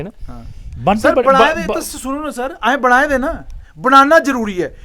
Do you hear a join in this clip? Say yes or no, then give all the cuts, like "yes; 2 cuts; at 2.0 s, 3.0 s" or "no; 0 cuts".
no; 0 cuts